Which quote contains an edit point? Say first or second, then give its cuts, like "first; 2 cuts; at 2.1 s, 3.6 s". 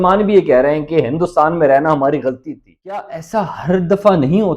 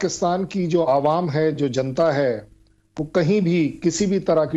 first; 1 cut; at 3.0 s